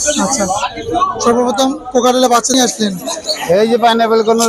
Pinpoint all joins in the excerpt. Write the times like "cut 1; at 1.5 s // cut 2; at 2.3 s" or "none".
cut 1; at 2.5 s